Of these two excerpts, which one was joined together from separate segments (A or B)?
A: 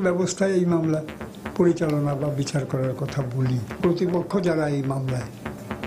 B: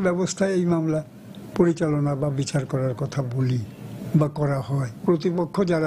A